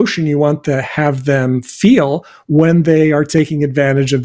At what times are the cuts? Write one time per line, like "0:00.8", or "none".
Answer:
none